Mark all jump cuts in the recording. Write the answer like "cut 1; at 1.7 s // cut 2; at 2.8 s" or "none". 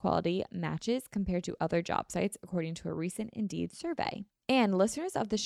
cut 1; at 4.3 s